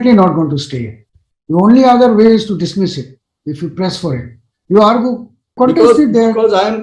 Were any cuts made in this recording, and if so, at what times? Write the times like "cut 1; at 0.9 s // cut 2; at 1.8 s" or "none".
cut 1; at 5.5 s